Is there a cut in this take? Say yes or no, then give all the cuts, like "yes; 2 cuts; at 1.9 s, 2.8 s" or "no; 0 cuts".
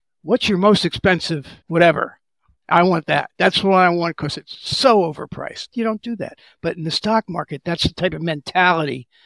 yes; 2 cuts; at 1.5 s, 5.7 s